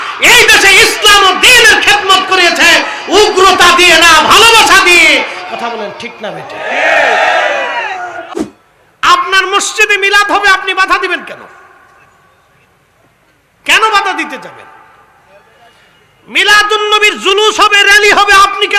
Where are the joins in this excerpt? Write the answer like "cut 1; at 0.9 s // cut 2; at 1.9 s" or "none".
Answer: cut 1; at 8.2 s